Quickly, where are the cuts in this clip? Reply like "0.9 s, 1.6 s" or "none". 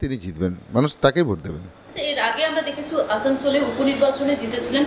none